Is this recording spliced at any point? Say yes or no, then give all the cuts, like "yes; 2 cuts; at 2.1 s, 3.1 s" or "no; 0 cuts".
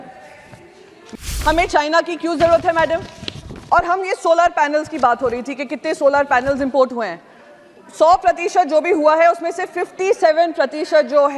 yes; 1 cut; at 1.3 s